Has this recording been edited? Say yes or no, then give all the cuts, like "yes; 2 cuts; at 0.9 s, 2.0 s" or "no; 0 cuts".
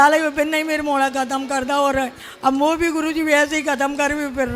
no; 0 cuts